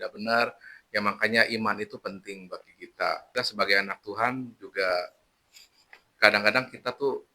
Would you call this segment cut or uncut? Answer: cut